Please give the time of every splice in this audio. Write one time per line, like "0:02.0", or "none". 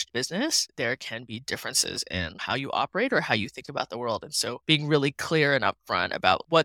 0:02.4